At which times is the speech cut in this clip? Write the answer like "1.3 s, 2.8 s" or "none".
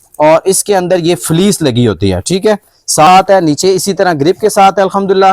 3.1 s